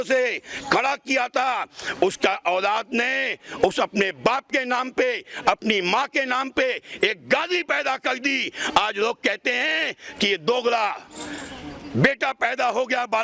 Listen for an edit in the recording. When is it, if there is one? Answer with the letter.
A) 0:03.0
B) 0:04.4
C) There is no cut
C